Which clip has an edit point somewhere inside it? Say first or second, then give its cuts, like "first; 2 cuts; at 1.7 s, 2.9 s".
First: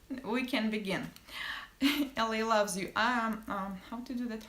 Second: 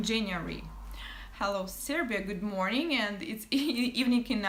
first; 1 cut; at 2.9 s